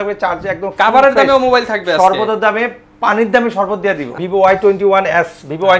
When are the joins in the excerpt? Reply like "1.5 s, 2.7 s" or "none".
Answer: 4.2 s